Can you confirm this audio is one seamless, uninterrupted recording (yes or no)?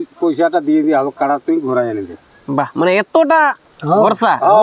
yes